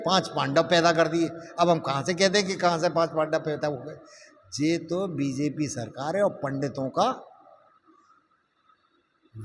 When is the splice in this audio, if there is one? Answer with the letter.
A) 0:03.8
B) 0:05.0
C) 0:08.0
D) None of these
D